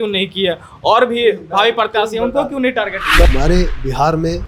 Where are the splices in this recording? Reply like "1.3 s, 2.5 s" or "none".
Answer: 3.2 s